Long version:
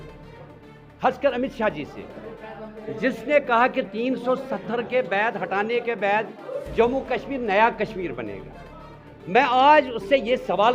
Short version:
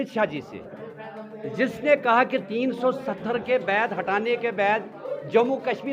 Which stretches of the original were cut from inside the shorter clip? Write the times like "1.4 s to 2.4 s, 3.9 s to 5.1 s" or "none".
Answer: none